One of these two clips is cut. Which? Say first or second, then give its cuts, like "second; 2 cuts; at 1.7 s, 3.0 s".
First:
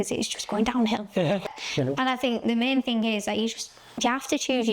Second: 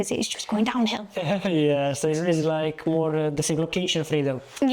first; 1 cut; at 1.4 s